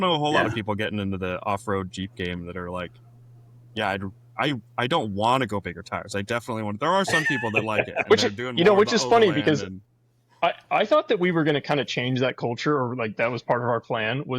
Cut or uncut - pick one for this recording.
uncut